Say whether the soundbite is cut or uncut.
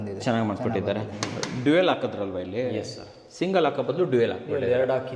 cut